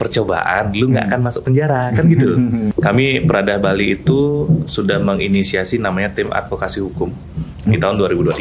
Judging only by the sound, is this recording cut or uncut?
cut